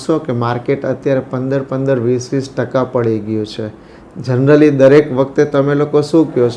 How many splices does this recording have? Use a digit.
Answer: 0